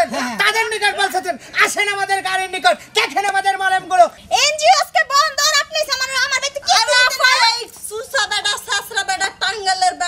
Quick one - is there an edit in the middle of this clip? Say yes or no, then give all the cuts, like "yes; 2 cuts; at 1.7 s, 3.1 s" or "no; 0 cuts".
yes; 1 cut; at 4.2 s